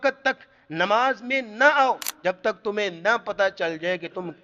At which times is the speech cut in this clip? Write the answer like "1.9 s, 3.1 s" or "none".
2.1 s